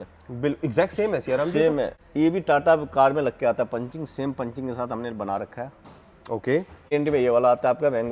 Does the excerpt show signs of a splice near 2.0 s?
yes; 2 cuts; at 2.0 s, 6.9 s

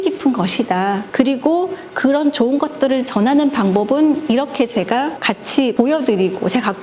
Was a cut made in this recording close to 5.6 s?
yes; 2 cuts; at 1.0 s, 5.6 s

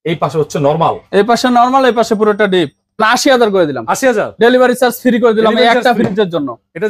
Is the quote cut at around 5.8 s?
no; 1 cut; at 3.0 s

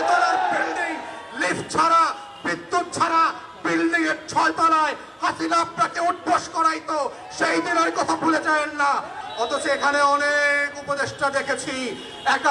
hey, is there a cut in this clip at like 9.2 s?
yes; 1 cut; at 9.2 s

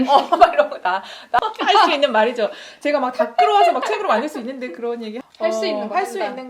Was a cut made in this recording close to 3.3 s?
no; 2 cuts; at 1.4 s, 5.2 s

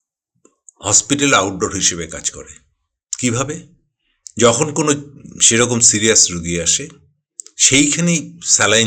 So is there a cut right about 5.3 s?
no; 0 cuts

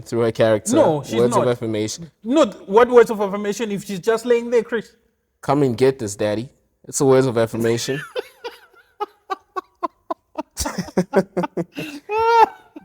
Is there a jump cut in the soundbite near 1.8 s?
no; 0 cuts

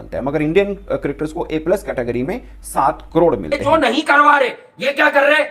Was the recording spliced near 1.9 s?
no; 1 cut; at 3.6 s

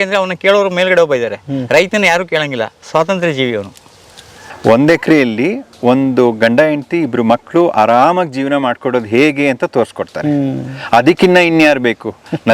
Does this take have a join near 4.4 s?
yes; 1 cut; at 4.4 s

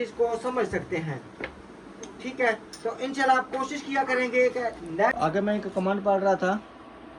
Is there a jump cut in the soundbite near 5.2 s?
yes; 1 cut; at 5.2 s

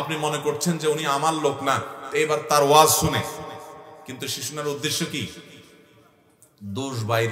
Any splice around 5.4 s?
no; 0 cuts

